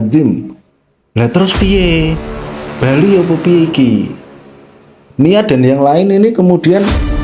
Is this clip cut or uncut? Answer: uncut